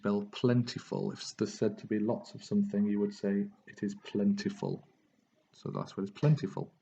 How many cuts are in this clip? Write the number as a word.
one